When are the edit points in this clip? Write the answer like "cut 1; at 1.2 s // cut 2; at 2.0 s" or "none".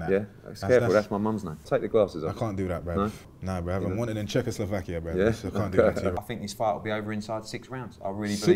cut 1; at 1.5 s // cut 2; at 3.4 s // cut 3; at 6.2 s